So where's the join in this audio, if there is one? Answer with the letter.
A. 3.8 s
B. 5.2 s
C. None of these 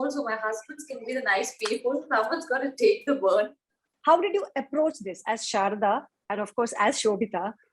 A